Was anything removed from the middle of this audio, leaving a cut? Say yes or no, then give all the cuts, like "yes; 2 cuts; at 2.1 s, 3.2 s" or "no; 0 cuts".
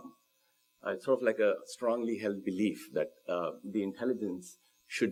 no; 0 cuts